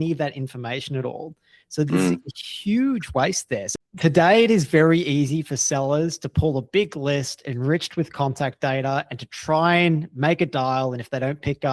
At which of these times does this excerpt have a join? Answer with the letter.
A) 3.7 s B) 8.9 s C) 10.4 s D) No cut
A